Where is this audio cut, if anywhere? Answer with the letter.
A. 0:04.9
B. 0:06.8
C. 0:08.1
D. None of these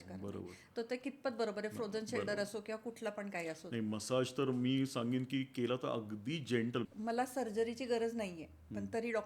B